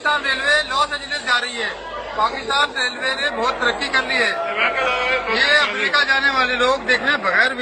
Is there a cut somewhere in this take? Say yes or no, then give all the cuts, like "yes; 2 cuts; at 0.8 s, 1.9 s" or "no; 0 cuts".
no; 0 cuts